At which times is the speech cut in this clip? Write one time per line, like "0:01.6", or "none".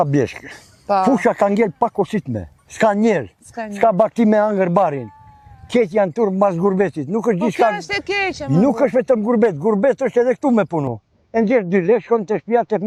none